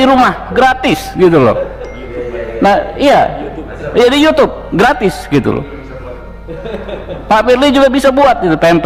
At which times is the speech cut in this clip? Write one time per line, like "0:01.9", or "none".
none